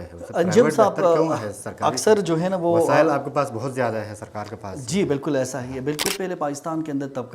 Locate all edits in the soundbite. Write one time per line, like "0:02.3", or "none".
0:06.0